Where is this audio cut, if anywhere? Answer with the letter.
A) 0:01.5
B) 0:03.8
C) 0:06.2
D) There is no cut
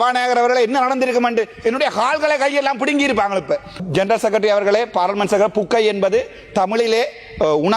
B